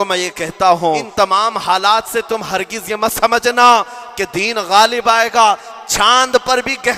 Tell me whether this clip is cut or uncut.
cut